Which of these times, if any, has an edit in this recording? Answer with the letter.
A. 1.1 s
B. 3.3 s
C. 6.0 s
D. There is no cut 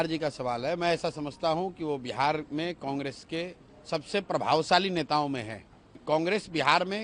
C